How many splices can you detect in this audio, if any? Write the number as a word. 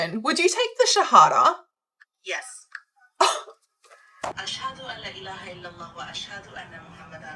zero